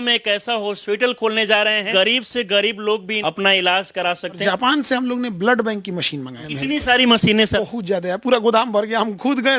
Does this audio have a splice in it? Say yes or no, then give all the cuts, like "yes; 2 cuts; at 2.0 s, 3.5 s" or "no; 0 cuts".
yes; 5 cuts; at 1.9 s, 3.1 s, 4.4 s, 6.4 s, 7.6 s